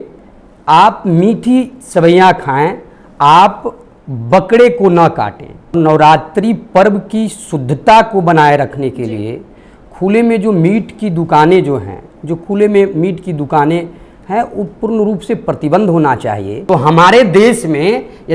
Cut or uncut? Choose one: cut